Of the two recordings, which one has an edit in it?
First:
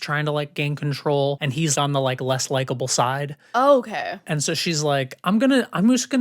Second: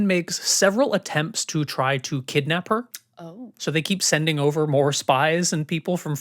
first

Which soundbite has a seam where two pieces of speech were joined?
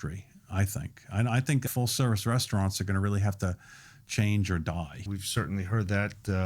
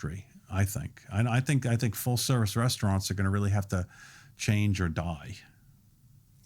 first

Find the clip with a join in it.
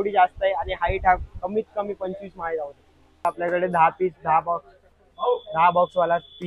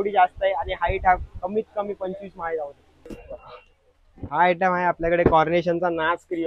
first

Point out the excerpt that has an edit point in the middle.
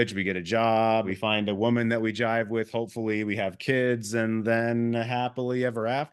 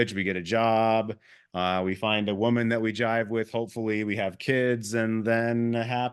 first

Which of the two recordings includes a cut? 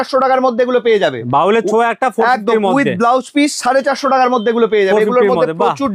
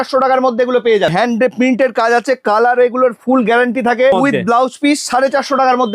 second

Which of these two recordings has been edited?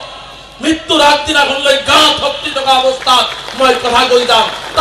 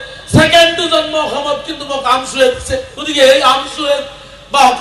second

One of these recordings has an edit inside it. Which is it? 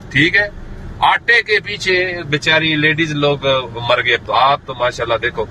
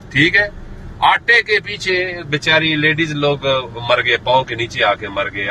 first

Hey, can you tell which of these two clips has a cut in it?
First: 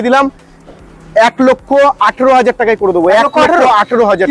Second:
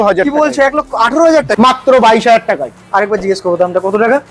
second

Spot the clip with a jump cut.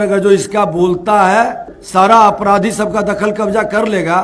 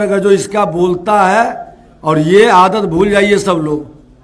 first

